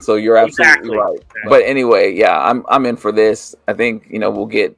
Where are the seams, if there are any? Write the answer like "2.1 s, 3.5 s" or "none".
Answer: 1.3 s